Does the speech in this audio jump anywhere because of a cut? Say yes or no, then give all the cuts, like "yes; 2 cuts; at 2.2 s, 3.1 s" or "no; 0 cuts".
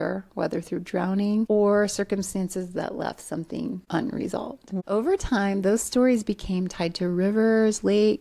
yes; 3 cuts; at 1.5 s, 3.8 s, 4.8 s